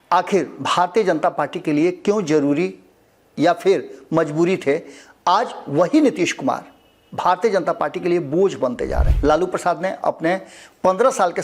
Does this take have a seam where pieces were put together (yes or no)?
yes